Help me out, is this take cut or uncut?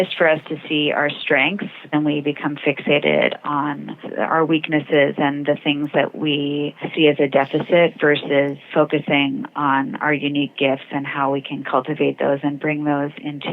cut